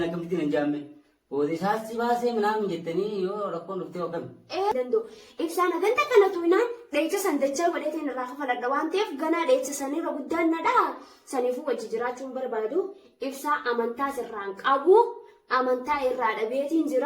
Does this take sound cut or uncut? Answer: cut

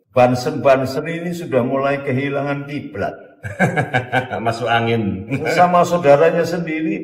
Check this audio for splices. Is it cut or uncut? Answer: uncut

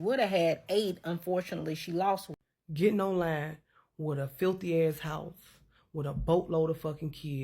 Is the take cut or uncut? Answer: cut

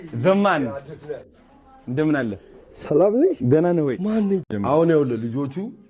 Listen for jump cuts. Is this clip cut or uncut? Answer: cut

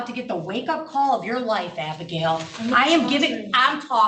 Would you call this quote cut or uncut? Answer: uncut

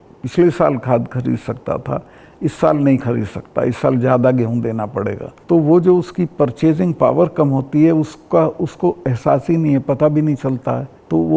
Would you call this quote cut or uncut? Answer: uncut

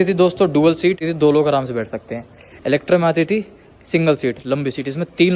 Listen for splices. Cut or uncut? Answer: cut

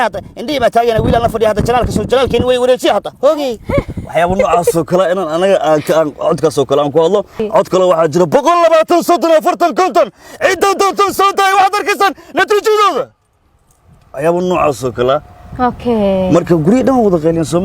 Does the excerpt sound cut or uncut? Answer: cut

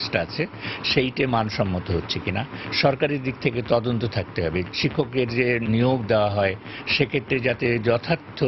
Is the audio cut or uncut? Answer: cut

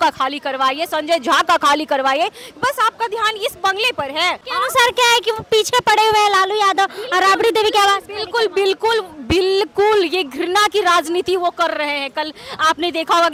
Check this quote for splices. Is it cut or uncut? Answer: uncut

